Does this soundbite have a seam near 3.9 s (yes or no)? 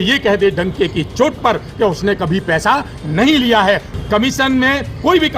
yes